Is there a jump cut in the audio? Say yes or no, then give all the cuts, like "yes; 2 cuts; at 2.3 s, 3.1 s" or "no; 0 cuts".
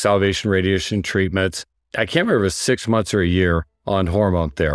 yes; 1 cut; at 3.7 s